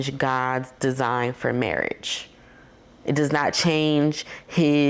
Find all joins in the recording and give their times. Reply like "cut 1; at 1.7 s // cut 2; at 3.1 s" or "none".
none